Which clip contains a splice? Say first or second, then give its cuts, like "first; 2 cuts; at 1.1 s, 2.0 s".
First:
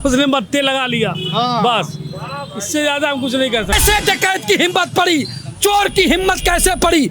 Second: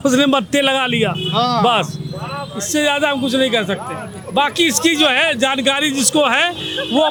first; 1 cut; at 3.8 s